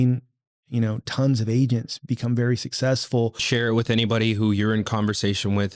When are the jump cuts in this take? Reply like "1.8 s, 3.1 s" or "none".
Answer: 3.5 s